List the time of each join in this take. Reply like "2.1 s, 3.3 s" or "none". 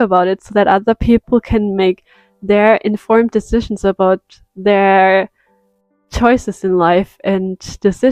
none